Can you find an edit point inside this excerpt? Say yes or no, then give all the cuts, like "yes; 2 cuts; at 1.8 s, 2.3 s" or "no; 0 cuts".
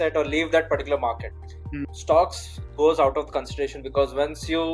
yes; 1 cut; at 1.7 s